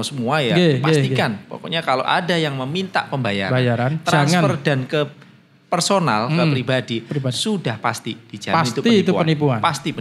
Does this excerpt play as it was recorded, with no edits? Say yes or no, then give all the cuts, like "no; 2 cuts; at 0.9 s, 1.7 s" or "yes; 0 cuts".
yes; 0 cuts